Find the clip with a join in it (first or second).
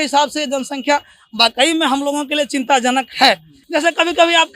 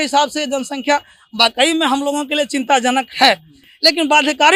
first